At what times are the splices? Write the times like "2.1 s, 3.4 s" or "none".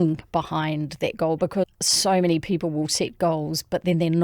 1.8 s